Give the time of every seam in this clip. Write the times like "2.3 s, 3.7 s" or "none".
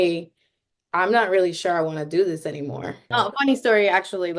2.9 s